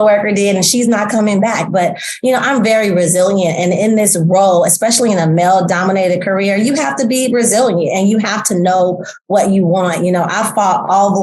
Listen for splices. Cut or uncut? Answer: uncut